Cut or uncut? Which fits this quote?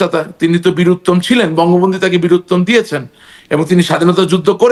uncut